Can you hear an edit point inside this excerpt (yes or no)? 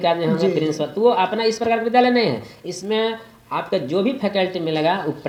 no